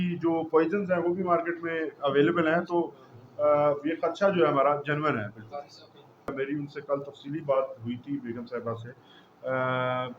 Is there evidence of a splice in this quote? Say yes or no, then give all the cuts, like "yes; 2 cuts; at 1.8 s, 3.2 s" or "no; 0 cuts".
yes; 1 cut; at 6.3 s